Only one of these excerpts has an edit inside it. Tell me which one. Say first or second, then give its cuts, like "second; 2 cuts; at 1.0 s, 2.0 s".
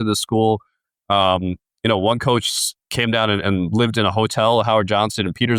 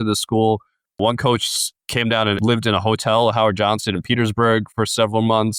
second; 3 cuts; at 1.0 s, 2.4 s, 4.7 s